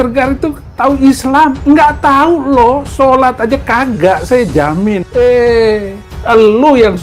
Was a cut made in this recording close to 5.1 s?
yes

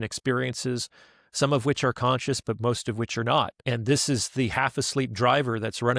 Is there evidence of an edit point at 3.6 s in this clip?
yes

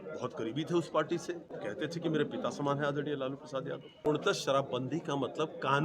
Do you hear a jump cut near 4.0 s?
yes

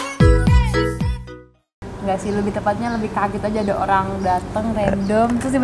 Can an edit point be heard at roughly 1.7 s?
yes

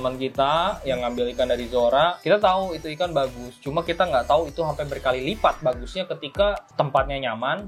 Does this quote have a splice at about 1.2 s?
no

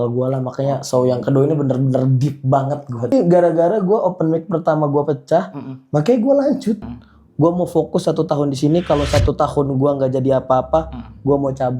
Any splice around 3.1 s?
yes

